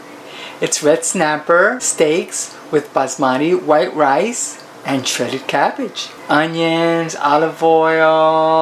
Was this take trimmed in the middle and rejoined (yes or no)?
yes